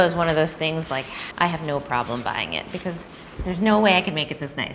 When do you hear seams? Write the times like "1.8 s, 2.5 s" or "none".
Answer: none